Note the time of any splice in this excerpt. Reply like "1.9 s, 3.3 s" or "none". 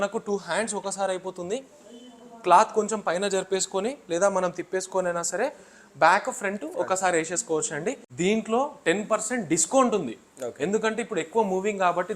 8.0 s